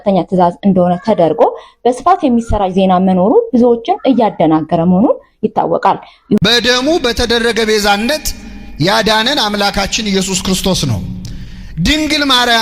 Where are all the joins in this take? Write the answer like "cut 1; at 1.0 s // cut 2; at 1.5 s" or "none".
cut 1; at 6.4 s